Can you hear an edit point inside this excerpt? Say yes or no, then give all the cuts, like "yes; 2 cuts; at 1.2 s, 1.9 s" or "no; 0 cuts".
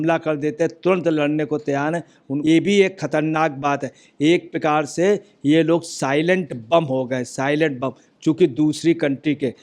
yes; 1 cut; at 2.2 s